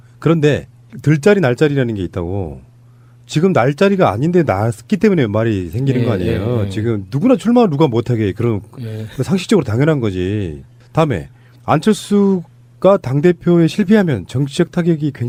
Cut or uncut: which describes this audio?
uncut